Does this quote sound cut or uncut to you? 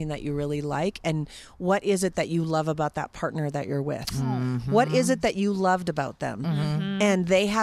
uncut